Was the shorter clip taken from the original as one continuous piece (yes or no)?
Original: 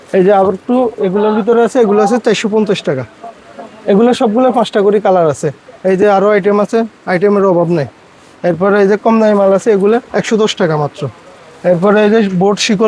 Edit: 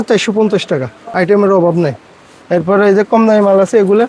no